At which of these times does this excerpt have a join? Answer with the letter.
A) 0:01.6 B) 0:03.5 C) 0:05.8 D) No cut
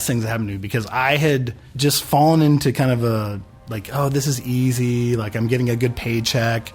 A